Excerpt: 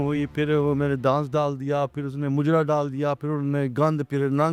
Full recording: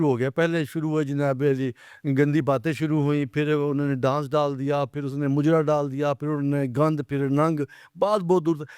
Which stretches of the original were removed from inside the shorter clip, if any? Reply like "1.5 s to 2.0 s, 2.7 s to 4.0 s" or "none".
none